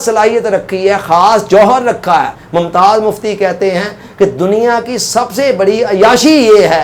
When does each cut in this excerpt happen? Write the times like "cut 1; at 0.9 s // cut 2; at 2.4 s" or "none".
cut 1; at 2.4 s